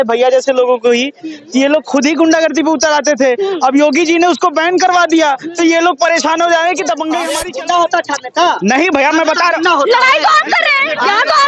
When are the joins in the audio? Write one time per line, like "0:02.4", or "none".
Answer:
0:07.4